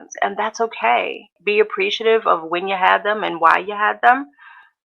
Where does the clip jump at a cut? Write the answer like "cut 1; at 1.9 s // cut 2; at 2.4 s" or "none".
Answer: cut 1; at 1.3 s